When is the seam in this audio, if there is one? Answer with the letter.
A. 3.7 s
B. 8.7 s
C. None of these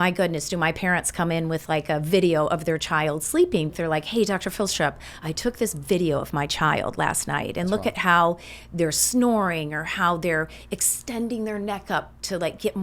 A